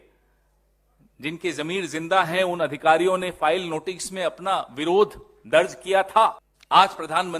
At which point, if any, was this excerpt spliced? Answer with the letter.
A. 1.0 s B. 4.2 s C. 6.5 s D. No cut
C